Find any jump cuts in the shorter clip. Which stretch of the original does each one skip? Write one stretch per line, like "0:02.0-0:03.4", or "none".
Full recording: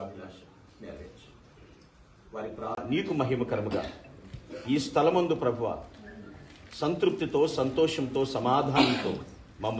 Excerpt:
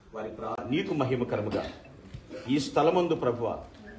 none